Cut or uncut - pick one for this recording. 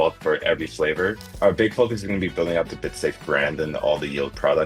cut